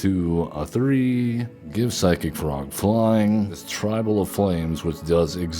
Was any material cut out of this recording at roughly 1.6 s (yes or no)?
yes